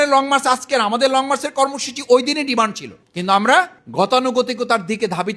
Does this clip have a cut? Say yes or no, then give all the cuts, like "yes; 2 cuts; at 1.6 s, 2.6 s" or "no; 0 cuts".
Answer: no; 0 cuts